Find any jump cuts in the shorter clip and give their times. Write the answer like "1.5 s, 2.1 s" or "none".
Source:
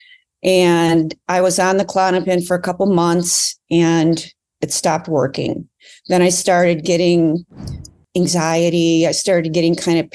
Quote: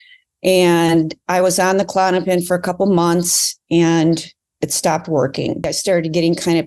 5.8 s